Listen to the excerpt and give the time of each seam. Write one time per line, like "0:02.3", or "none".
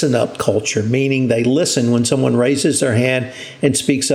none